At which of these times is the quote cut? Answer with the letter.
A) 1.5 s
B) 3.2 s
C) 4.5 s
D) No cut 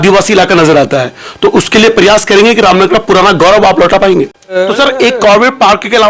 C